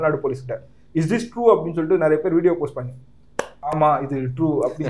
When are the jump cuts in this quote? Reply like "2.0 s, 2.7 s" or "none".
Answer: 3.8 s